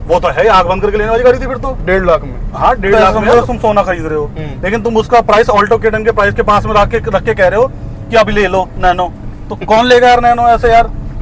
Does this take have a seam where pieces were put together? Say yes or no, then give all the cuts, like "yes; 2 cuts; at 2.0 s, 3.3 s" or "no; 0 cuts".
yes; 1 cut; at 3.1 s